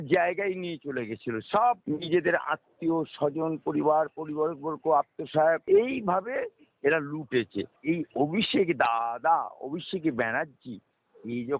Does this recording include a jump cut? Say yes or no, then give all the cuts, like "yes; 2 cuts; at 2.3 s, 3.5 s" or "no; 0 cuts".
yes; 3 cuts; at 1.8 s, 5.6 s, 7.7 s